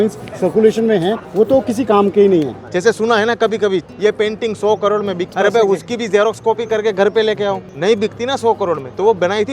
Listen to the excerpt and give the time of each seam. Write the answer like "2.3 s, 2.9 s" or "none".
1.2 s, 2.6 s, 3.9 s, 5.3 s, 7.7 s